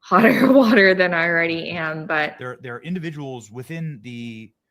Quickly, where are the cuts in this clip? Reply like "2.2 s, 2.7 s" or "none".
2.4 s

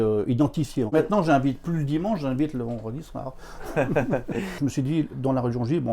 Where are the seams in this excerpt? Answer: 0.9 s, 4.6 s

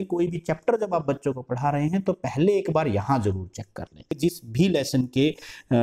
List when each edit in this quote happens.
4.4 s

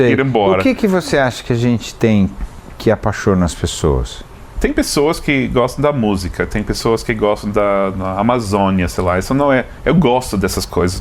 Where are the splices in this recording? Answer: 4.4 s

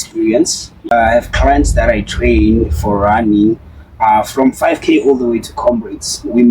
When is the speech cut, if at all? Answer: 0.9 s

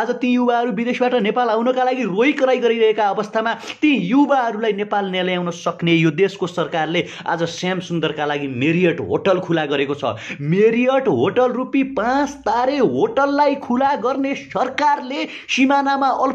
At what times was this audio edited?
none

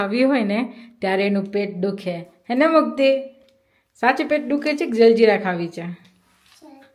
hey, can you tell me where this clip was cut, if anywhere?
none

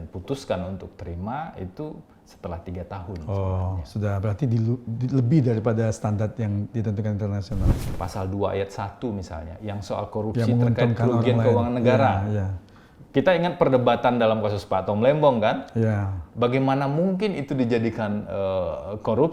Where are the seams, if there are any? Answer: 7.8 s

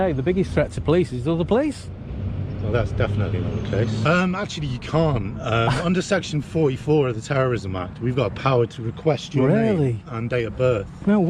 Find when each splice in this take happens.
4.0 s

